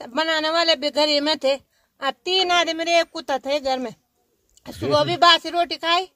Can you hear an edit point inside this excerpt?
no; 0 cuts

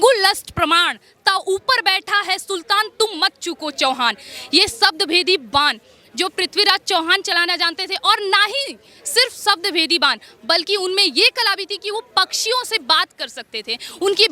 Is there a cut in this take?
no; 0 cuts

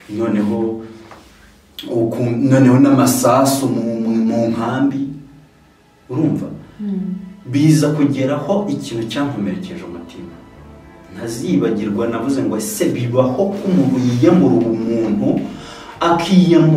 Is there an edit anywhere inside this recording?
no; 0 cuts

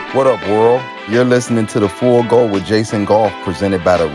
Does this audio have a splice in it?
yes; 1 cut; at 1.1 s

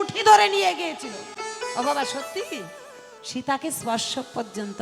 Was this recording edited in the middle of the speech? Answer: no; 0 cuts

